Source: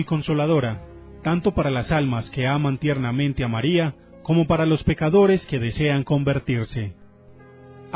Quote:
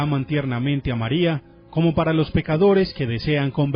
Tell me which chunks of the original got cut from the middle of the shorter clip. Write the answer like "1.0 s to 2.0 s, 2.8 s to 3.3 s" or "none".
none